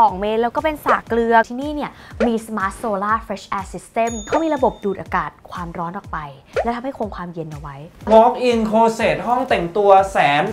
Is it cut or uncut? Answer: cut